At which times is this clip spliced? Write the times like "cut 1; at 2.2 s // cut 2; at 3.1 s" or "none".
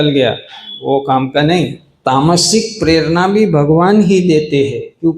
cut 1; at 1.9 s